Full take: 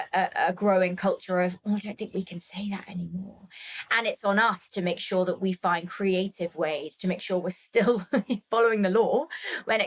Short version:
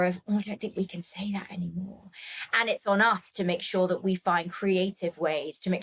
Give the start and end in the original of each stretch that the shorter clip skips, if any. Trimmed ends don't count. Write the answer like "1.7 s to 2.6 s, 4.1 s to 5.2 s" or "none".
none